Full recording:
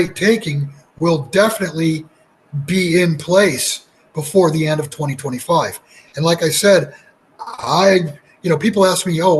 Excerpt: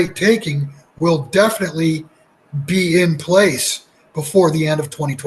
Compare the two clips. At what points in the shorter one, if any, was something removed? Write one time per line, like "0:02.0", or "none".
none